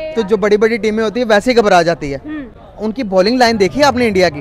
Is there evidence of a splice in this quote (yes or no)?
no